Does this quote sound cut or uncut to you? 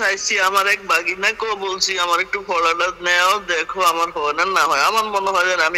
uncut